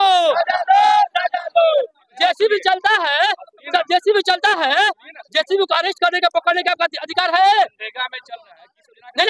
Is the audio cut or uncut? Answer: cut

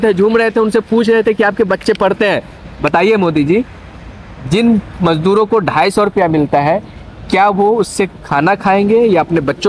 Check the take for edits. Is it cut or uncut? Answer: uncut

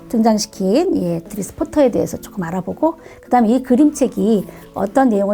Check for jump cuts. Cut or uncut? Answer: cut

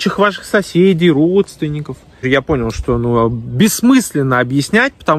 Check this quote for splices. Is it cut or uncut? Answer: cut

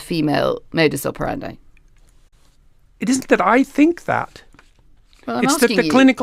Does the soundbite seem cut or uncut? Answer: uncut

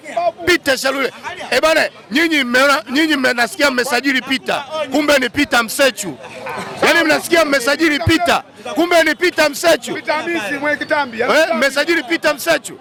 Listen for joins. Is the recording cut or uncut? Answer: uncut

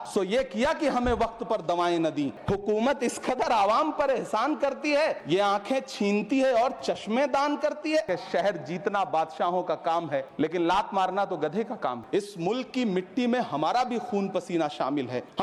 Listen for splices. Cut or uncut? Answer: cut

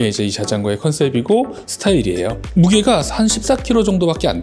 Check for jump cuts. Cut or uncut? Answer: uncut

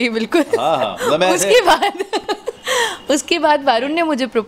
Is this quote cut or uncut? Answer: uncut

